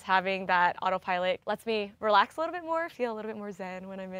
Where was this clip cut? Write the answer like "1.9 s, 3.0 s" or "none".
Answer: 1.5 s